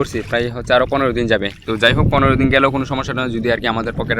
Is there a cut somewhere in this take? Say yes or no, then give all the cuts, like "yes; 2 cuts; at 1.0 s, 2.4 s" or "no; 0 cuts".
no; 0 cuts